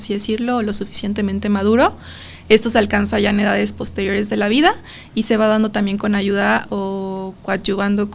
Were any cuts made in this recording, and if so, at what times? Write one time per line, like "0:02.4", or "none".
none